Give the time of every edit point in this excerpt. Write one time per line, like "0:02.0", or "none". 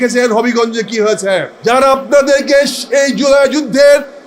0:01.5